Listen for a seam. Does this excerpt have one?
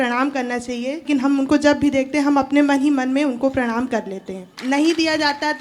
yes; 2 cuts; at 1.0 s, 4.5 s

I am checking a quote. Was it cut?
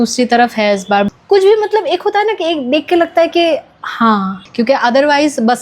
yes; 2 cuts; at 1.1 s, 4.4 s

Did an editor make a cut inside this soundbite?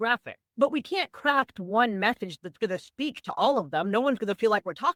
no; 0 cuts

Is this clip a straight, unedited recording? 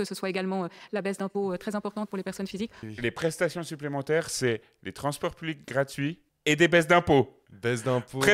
no; 3 cuts; at 2.8 s, 6.3 s, 7.5 s

